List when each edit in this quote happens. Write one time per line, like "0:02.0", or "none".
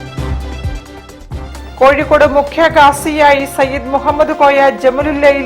0:01.5